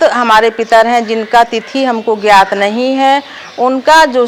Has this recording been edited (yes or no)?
no